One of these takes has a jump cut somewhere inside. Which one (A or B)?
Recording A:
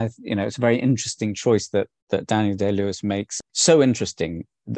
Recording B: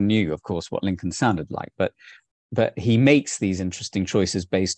A